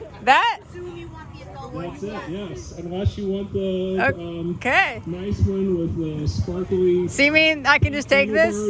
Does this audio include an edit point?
no; 0 cuts

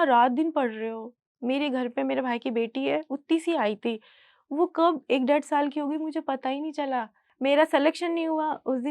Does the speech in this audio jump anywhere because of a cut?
yes; 1 cut; at 7.2 s

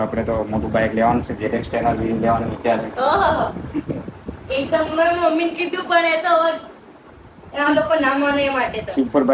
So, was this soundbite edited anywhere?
no; 0 cuts

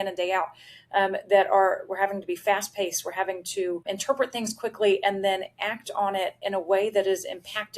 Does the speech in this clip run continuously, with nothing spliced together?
no; 1 cut; at 3.8 s

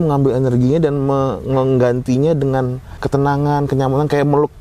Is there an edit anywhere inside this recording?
yes; 1 cut; at 3.0 s

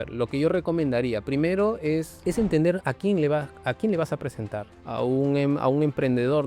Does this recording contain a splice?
yes; 2 cuts; at 2.1 s, 4.7 s

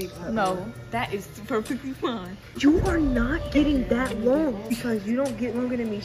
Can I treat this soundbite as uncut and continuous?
no; 2 cuts; at 2.5 s, 4.7 s

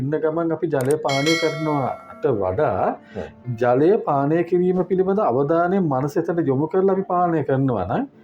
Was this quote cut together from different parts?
no; 0 cuts

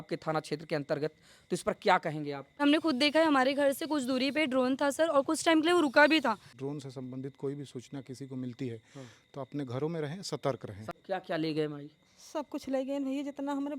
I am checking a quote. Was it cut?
yes; 3 cuts; at 2.6 s, 6.5 s, 10.8 s

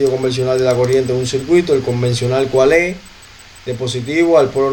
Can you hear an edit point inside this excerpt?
no; 0 cuts

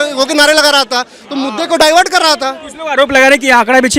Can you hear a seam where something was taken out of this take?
no; 0 cuts

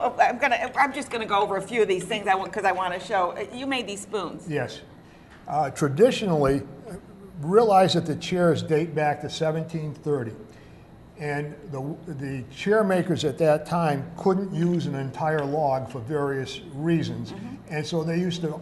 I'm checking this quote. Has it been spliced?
yes; 1 cut; at 2.1 s

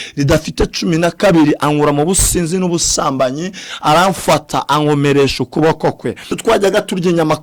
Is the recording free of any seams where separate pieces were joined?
no; 1 cut; at 6.3 s

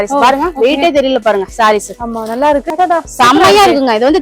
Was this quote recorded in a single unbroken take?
no; 1 cut; at 2.7 s

